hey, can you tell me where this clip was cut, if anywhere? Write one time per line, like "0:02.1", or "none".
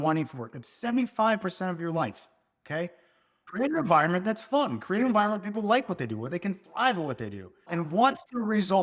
0:03.5
0:07.7